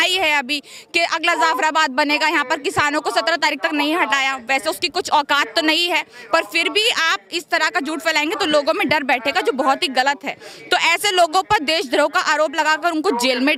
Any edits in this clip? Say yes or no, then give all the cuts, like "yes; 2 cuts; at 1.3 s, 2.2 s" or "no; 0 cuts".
no; 0 cuts